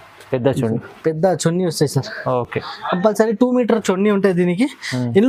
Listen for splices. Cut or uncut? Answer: uncut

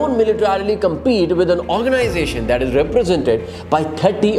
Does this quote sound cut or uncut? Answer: uncut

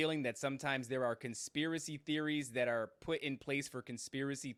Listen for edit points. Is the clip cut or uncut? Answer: uncut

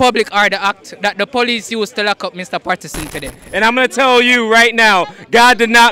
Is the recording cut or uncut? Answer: cut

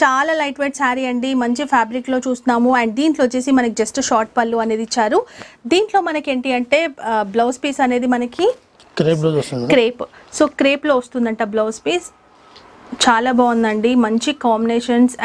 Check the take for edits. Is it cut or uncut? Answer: uncut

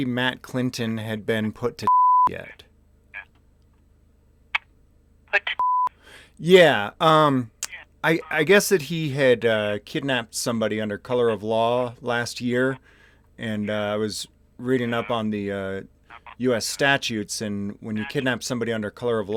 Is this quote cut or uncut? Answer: uncut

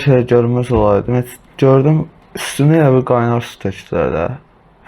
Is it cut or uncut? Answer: cut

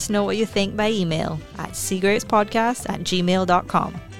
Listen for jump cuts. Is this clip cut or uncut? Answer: uncut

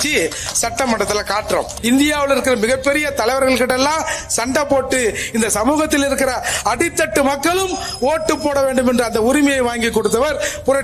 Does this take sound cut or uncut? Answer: cut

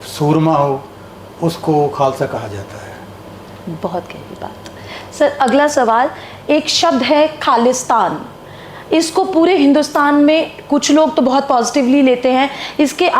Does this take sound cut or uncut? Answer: uncut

